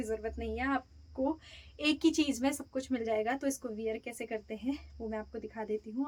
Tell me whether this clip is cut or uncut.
uncut